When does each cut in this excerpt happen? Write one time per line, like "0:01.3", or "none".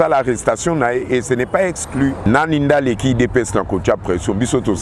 0:02.3